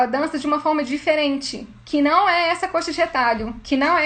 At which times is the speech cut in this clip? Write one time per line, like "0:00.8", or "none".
none